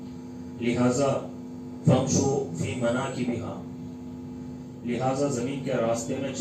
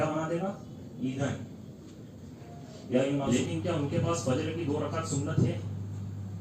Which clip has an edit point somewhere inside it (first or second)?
second